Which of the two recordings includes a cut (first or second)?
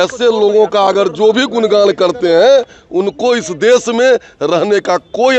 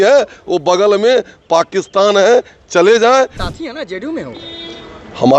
second